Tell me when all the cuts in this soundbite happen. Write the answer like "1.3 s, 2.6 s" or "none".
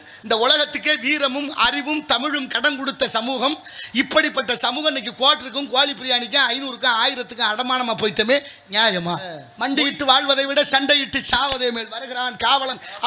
9.5 s